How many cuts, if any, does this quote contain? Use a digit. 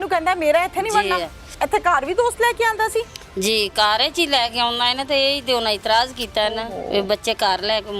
1